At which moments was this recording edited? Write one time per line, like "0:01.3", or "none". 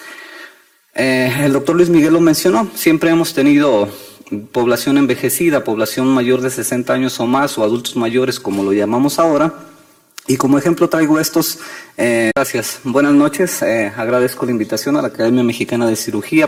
none